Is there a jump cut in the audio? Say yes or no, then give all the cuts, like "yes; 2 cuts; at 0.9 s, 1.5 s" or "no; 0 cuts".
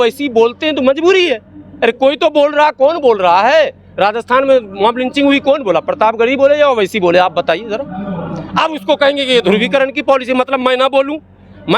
no; 0 cuts